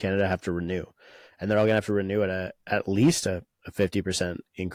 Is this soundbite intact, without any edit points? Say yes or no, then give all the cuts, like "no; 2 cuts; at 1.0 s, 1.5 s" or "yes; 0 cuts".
yes; 0 cuts